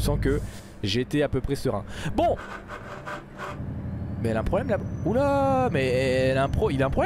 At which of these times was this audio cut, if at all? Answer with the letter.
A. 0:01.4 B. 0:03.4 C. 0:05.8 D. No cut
D